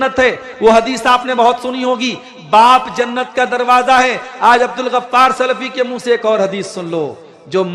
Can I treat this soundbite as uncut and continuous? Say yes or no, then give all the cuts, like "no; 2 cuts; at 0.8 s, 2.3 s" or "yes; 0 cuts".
yes; 0 cuts